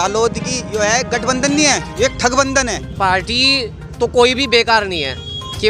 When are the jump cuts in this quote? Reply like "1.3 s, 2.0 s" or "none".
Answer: 2.9 s